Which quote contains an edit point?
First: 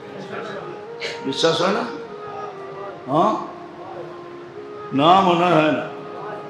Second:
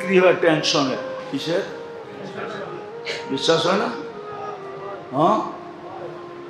second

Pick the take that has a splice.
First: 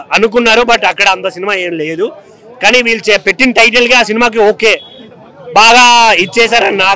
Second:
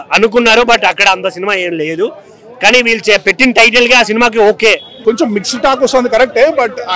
second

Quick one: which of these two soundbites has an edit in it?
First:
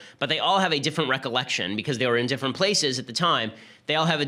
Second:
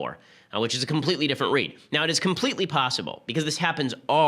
second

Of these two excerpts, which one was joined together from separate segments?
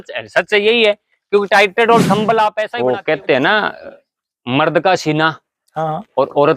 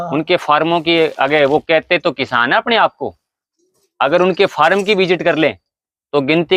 first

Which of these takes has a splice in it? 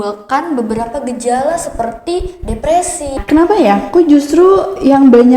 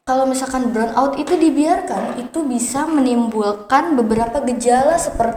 first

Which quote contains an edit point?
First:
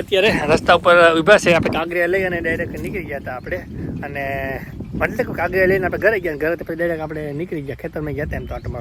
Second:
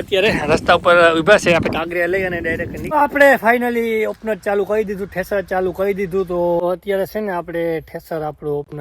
second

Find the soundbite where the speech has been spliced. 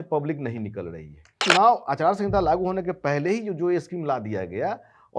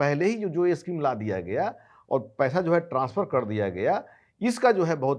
first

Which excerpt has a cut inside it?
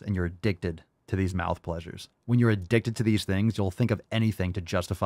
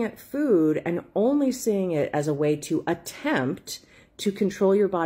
first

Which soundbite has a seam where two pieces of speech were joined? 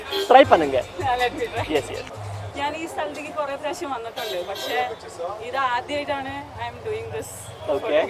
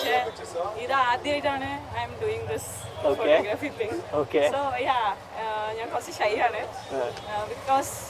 first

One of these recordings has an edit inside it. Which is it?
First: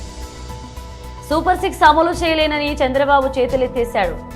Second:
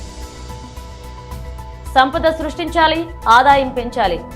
first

